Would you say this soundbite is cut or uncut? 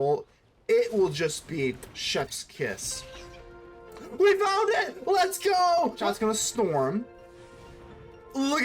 cut